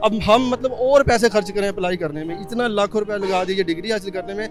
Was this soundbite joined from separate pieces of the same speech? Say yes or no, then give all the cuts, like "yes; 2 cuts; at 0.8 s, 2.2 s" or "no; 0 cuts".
no; 0 cuts